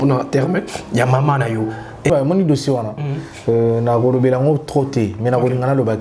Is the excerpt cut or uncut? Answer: cut